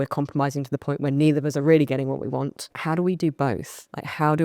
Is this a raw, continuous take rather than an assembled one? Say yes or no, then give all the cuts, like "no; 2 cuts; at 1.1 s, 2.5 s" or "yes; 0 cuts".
no; 1 cut; at 2.7 s